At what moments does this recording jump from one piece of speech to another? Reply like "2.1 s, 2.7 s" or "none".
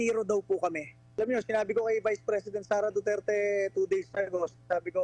1.2 s

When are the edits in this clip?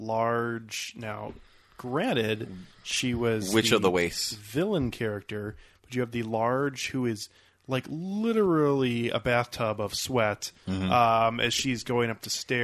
none

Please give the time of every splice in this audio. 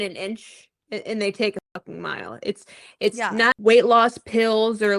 3.4 s

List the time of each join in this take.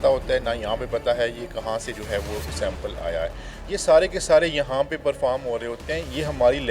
3.5 s

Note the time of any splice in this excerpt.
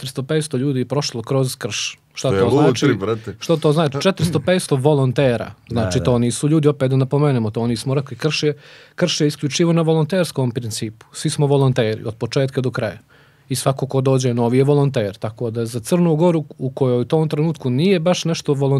none

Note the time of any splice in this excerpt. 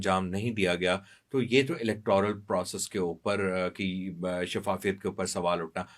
none

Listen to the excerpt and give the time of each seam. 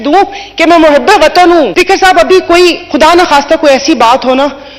1.7 s

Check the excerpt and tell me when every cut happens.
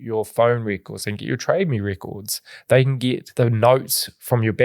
3.3 s

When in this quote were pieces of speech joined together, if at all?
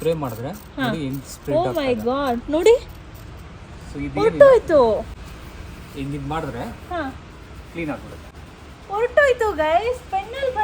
none

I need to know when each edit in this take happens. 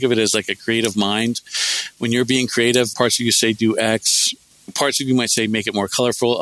2.9 s, 4.7 s

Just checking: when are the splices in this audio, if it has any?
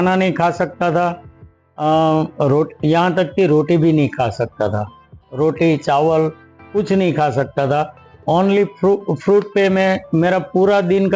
none

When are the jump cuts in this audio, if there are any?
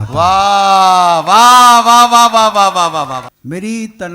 3.2 s

